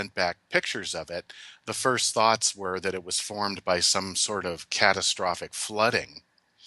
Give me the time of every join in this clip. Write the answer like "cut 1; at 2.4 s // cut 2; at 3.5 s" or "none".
cut 1; at 4.7 s